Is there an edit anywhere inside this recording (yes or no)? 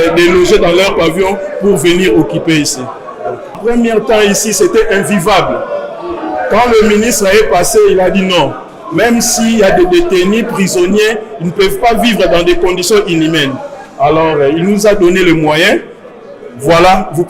yes